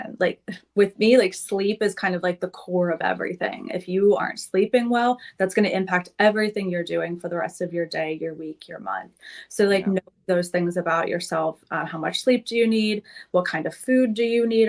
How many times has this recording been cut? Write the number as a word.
zero